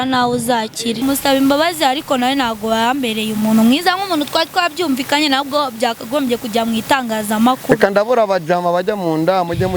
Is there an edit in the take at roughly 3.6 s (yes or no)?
no